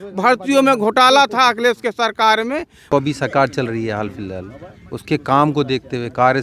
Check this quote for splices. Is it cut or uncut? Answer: cut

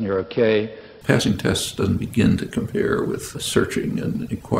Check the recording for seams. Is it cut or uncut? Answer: cut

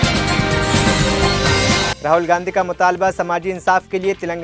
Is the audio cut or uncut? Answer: uncut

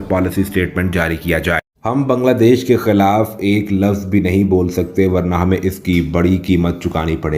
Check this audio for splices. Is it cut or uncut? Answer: cut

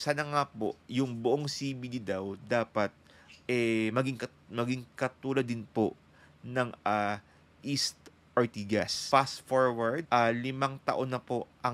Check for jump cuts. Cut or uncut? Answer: cut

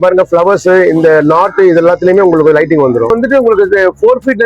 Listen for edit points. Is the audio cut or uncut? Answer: cut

